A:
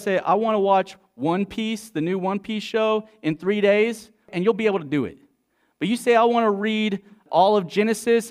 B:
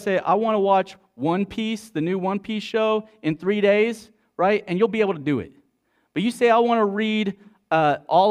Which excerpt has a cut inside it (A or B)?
A